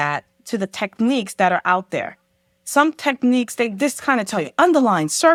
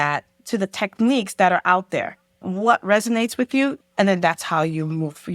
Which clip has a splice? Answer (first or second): second